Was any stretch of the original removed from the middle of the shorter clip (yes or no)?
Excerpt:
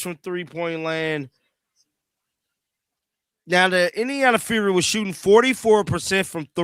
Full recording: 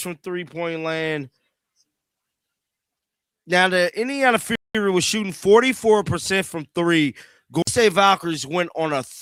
yes